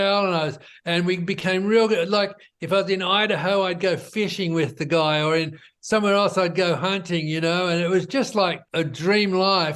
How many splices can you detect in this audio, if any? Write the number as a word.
one